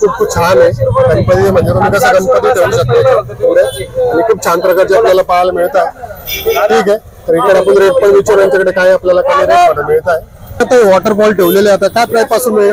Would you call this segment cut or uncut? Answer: uncut